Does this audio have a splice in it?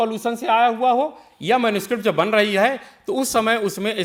no; 0 cuts

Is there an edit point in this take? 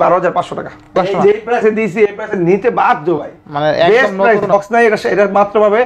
yes; 2 cuts; at 0.9 s, 4.5 s

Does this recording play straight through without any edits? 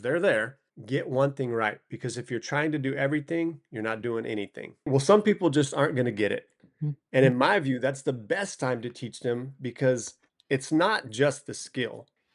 no; 1 cut; at 4.9 s

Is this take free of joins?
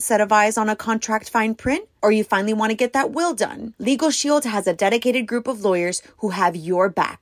yes; 0 cuts

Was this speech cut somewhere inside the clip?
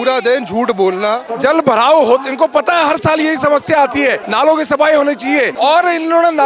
yes; 3 cuts; at 1.3 s, 4.2 s, 5.5 s

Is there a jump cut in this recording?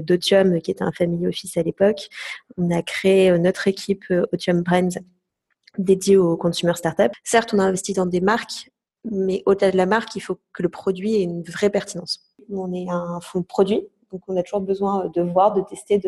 yes; 2 cuts; at 7.2 s, 12.4 s

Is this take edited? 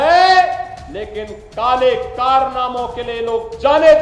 no; 0 cuts

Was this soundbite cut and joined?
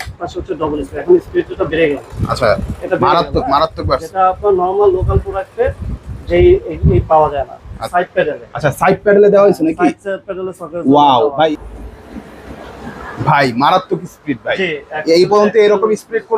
yes; 2 cuts; at 7.8 s, 11.3 s

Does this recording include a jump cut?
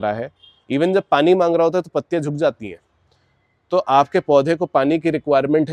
no; 0 cuts

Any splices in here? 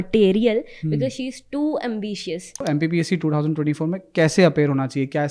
yes; 1 cut; at 2.6 s

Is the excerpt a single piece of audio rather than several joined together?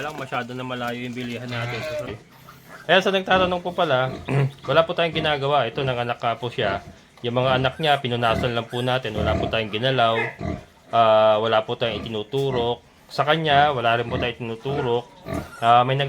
no; 1 cut; at 2.1 s

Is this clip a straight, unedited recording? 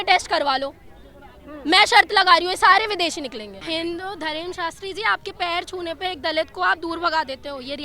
no; 1 cut; at 3.5 s

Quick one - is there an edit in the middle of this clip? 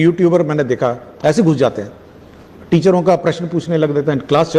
no; 0 cuts

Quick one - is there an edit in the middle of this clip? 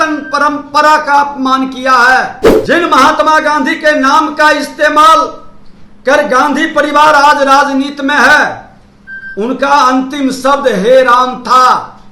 yes; 1 cut; at 2.5 s

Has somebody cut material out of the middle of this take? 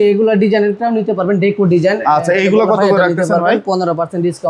no; 0 cuts

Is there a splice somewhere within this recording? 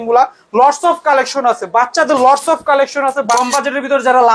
yes; 1 cut; at 3.3 s

